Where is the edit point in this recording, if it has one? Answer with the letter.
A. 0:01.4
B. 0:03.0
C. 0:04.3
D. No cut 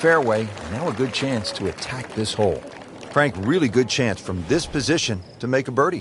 B